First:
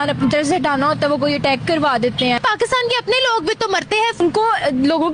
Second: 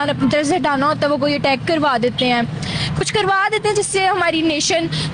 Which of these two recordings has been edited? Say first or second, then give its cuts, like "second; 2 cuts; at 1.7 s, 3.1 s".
first; 2 cuts; at 2.4 s, 4.2 s